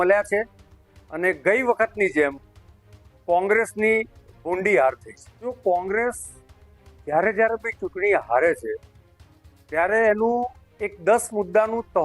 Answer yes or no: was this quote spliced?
no